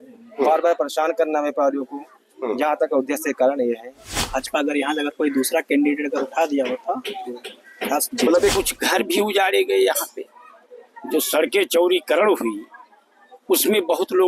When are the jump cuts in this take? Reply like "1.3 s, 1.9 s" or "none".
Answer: 4.2 s, 8.5 s